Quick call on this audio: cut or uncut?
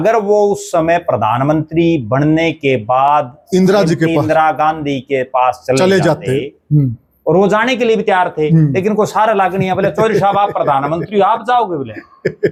uncut